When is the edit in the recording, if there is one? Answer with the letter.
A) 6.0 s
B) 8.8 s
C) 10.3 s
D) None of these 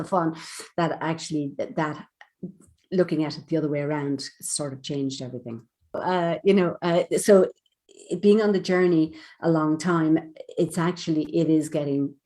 A